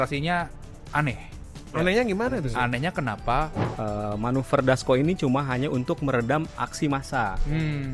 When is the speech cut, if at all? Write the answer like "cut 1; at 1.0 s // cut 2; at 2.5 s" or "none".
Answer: cut 1; at 3.6 s